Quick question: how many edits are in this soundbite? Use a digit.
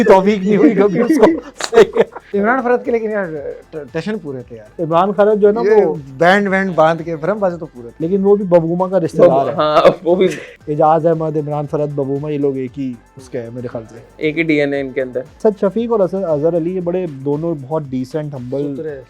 3